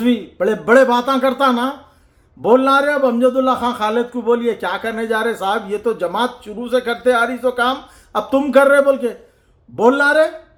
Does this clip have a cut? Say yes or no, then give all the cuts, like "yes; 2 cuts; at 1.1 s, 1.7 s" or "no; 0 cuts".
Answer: no; 0 cuts